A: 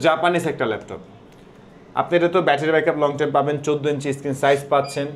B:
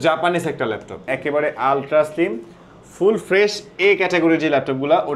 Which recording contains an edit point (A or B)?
B